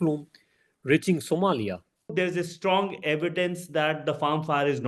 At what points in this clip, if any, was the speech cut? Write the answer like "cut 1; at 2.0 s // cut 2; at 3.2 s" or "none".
cut 1; at 2.1 s